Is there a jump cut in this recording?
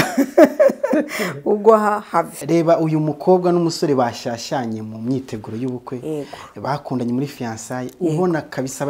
yes; 1 cut; at 2.4 s

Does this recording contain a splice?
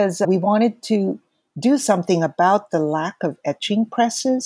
no; 0 cuts

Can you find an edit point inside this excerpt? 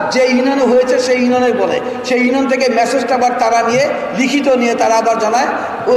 no; 0 cuts

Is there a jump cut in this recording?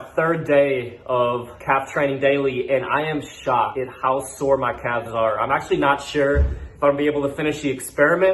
yes; 2 cuts; at 1.5 s, 3.7 s

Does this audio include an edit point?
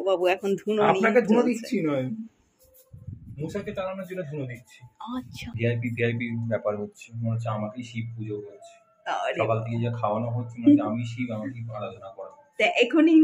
yes; 1 cut; at 5.6 s

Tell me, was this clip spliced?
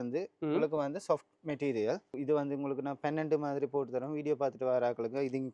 yes; 1 cut; at 2.1 s

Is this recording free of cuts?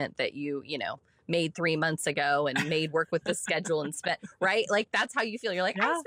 yes; 0 cuts

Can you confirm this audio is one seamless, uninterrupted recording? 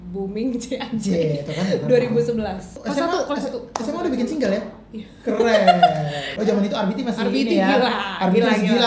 no; 2 cuts; at 2.7 s, 6.2 s

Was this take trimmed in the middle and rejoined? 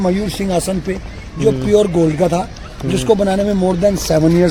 no; 0 cuts

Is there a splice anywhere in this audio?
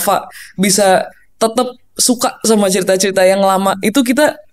no; 0 cuts

